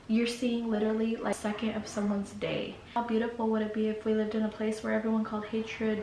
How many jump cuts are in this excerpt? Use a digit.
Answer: 2